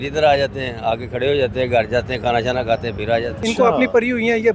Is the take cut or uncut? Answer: cut